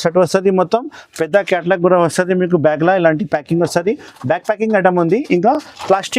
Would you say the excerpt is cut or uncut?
uncut